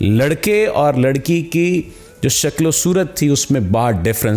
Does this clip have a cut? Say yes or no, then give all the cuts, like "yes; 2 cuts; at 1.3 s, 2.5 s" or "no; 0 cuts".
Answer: no; 0 cuts